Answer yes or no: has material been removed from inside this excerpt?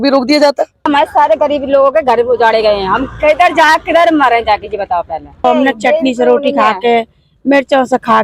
yes